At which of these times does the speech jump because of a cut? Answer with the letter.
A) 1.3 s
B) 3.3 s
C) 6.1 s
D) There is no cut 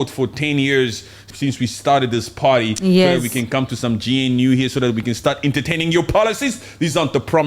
A